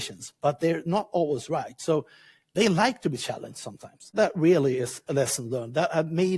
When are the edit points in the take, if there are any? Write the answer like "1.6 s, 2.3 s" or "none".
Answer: 4.1 s